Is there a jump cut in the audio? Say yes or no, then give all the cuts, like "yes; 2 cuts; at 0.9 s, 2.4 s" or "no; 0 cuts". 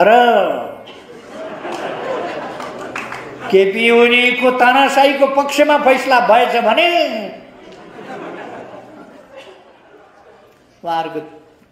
no; 0 cuts